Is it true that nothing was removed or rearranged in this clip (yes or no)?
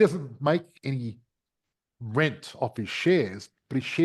yes